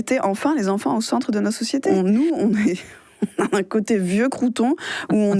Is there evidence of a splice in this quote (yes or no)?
yes